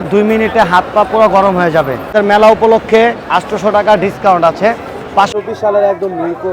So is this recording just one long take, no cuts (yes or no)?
no